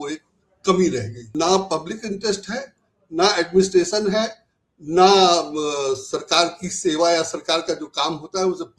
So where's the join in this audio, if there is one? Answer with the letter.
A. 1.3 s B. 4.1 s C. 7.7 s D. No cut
A